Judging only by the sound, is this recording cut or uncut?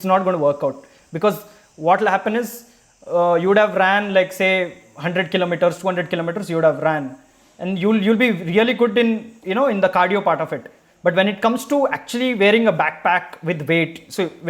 uncut